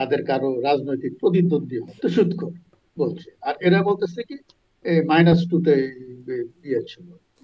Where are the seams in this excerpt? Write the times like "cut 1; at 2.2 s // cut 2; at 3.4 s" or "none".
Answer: cut 1; at 1.8 s